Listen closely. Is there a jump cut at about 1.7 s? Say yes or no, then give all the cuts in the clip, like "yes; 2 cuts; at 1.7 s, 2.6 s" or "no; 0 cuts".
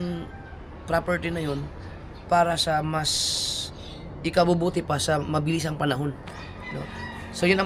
no; 0 cuts